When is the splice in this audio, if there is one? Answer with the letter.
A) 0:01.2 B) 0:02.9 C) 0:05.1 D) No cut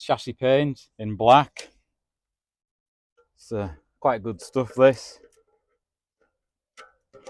D